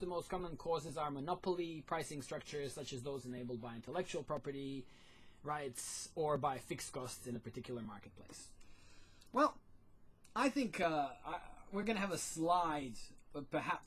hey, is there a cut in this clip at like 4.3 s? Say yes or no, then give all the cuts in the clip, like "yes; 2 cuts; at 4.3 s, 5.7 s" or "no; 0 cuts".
yes; 1 cut; at 4.3 s